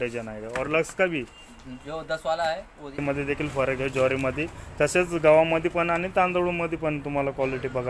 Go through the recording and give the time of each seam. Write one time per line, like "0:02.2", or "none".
0:03.0